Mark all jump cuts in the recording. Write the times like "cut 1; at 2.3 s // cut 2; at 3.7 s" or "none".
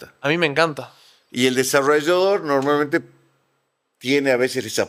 none